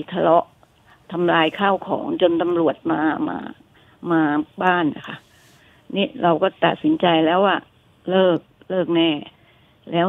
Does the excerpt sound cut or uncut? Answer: uncut